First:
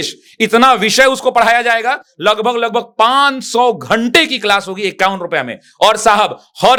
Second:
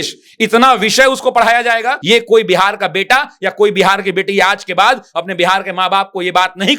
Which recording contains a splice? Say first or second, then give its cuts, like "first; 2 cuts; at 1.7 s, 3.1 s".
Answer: second; 1 cut; at 2.0 s